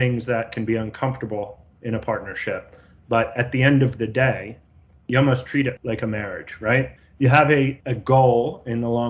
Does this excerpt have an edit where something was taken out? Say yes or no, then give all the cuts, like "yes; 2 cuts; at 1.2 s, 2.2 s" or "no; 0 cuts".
yes; 3 cuts; at 5.8 s, 6.9 s, 7.9 s